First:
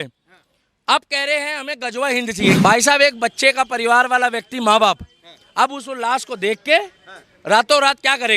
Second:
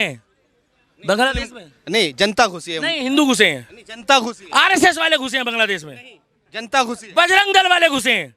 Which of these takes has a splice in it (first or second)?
first